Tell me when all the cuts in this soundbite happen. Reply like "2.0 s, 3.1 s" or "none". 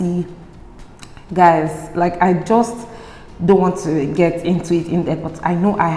none